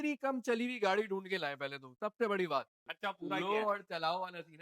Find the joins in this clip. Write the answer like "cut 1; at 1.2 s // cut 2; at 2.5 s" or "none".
cut 1; at 2.8 s